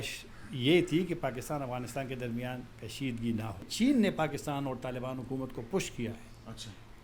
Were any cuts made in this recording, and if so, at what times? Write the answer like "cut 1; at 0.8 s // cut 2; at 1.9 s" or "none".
cut 1; at 3.7 s